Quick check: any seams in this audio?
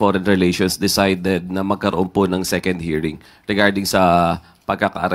no; 0 cuts

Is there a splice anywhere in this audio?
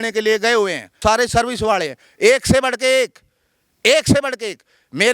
yes; 1 cut; at 0.9 s

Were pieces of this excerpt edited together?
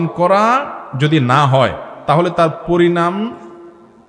no; 0 cuts

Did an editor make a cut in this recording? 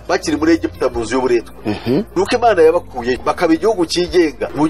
no; 0 cuts

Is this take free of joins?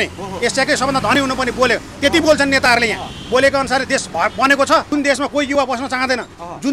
no; 1 cut; at 4.9 s

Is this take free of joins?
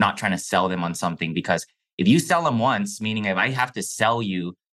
yes; 0 cuts

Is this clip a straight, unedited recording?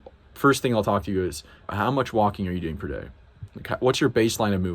no; 1 cut; at 1.6 s

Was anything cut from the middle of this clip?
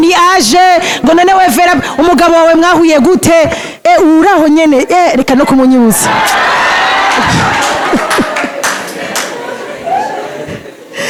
no; 0 cuts

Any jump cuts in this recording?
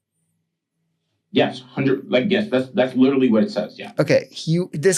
no; 0 cuts

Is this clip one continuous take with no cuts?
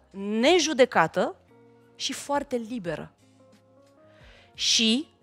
yes; 0 cuts

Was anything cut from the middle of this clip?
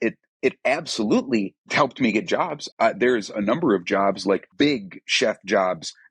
yes; 3 cuts; at 1.6 s, 2.6 s, 4.5 s

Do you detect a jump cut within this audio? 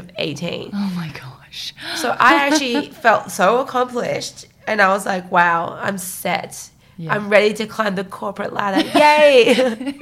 no; 0 cuts

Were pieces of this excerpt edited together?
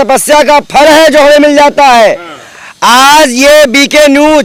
no; 0 cuts

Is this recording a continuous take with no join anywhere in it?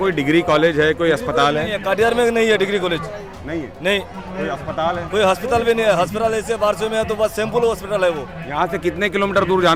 yes; 0 cuts

